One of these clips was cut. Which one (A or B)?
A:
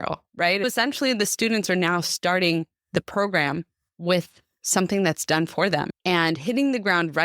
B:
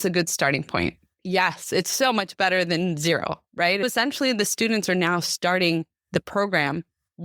A